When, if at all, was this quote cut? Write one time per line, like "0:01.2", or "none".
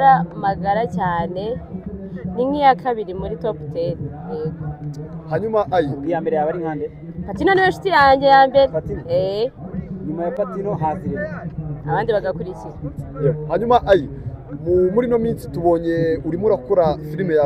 none